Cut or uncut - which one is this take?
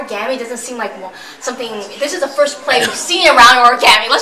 uncut